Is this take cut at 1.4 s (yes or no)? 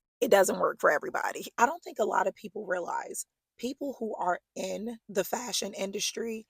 yes